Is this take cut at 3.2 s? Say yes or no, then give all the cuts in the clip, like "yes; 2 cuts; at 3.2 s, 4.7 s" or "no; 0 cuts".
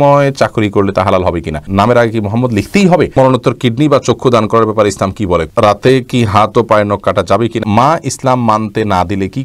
yes; 4 cuts; at 1.6 s, 3.2 s, 5.5 s, 7.6 s